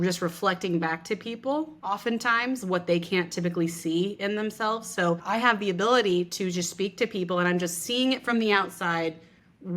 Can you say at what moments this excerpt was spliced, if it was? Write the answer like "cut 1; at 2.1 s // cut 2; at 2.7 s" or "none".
cut 1; at 1.8 s // cut 2; at 5.2 s